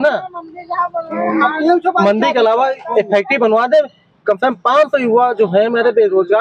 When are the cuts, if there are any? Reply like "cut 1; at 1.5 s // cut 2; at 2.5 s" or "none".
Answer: none